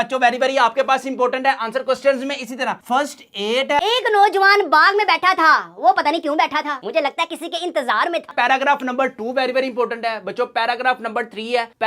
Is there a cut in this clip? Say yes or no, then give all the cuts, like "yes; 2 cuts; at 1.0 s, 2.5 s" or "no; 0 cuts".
yes; 2 cuts; at 3.8 s, 8.3 s